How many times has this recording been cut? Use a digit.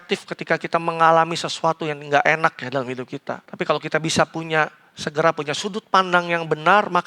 1